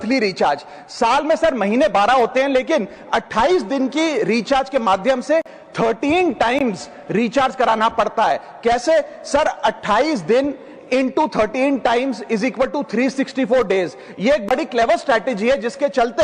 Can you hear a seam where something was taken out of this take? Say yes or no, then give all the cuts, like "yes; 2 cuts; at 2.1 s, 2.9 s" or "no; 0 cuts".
no; 0 cuts